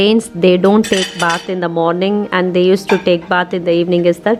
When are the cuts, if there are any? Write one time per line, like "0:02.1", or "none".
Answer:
none

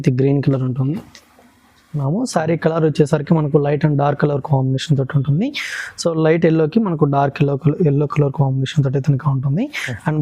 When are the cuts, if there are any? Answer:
0:01.9

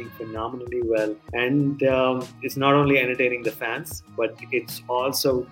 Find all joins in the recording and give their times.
0:01.2
0:02.4

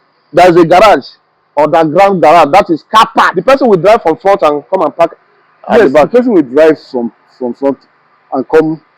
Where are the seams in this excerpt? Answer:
0:03.3

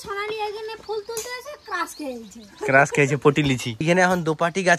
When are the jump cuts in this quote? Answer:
0:03.8

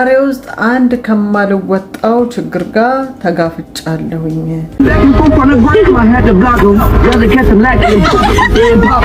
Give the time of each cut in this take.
0:04.7

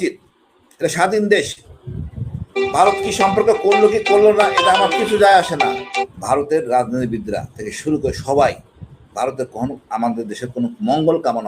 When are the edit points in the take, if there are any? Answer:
0:06.1

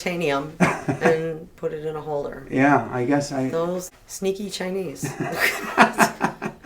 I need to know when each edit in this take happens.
0:03.9

